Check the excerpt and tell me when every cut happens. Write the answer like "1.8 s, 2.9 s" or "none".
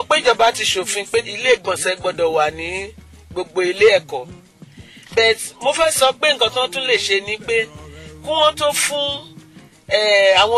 1.2 s